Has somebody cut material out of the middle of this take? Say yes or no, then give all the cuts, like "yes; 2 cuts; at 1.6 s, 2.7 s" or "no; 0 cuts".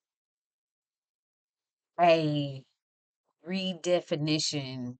no; 0 cuts